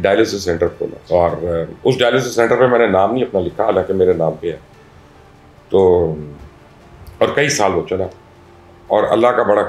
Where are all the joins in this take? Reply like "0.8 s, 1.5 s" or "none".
none